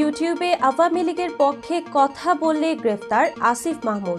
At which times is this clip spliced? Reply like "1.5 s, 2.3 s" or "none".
none